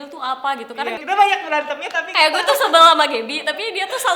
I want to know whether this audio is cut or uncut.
cut